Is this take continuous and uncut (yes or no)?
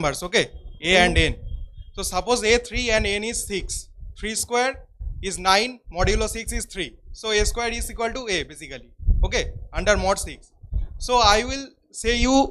yes